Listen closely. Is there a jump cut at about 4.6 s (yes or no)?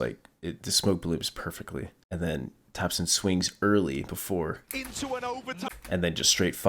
no